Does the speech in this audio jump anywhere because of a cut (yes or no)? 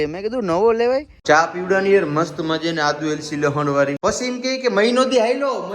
yes